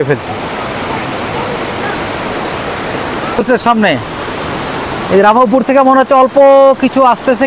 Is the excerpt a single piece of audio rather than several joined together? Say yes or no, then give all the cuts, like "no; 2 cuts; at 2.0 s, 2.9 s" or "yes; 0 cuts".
no; 1 cut; at 3.4 s